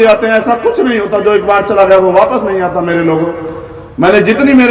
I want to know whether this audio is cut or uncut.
uncut